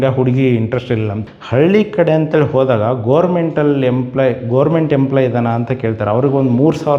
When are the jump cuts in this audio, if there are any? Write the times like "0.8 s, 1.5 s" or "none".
1.2 s